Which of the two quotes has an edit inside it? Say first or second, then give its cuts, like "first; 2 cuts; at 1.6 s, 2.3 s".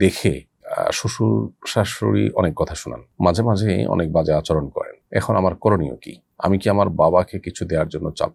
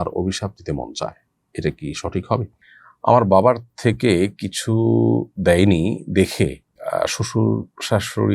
second; 1 cut; at 2.5 s